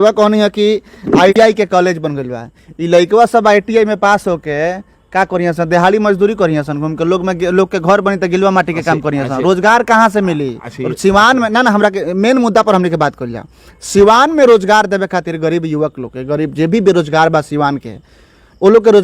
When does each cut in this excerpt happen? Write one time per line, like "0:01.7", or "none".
0:01.3